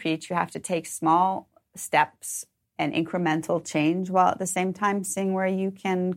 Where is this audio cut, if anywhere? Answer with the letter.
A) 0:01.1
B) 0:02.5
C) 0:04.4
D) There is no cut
B